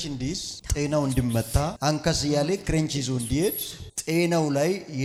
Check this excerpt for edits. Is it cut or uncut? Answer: uncut